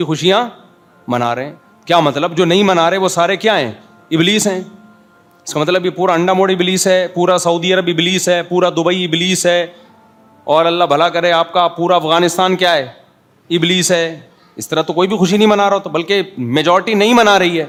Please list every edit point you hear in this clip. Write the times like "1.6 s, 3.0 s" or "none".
none